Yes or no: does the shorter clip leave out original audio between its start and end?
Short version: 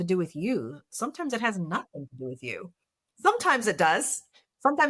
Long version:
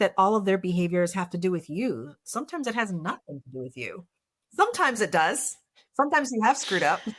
no